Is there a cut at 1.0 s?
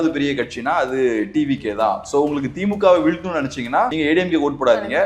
no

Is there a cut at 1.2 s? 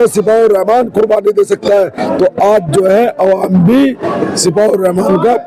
no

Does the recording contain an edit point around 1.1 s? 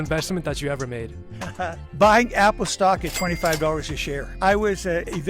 no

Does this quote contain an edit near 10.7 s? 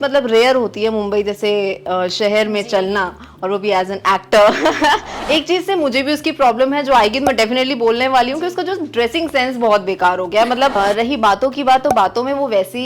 yes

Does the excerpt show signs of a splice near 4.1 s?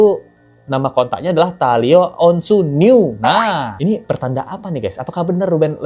no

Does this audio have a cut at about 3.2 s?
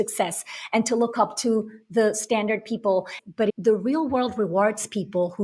yes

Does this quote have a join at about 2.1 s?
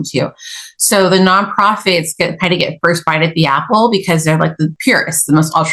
no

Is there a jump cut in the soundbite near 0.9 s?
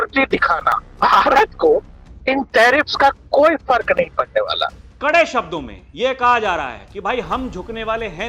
yes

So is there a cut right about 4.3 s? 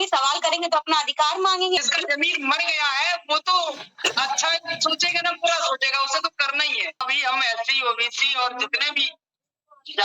no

